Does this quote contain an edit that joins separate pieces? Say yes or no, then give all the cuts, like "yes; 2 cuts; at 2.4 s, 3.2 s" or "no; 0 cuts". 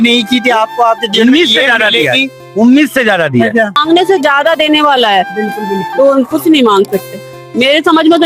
yes; 1 cut; at 3.8 s